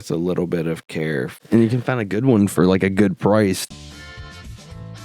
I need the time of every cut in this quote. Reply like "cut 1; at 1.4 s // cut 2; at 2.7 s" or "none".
cut 1; at 1.4 s // cut 2; at 3.6 s